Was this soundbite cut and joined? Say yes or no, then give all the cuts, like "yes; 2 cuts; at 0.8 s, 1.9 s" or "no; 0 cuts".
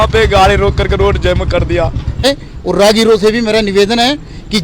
yes; 1 cut; at 2.2 s